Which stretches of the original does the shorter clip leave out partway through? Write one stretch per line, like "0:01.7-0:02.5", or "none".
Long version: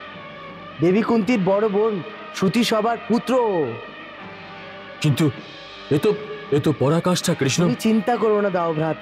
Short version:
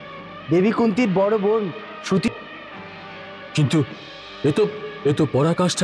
0:02.6-0:03.7